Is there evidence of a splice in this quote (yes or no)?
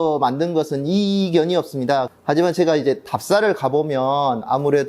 yes